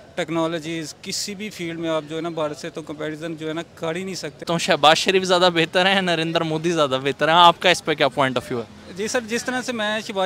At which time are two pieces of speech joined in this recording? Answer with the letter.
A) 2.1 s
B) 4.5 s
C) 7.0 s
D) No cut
B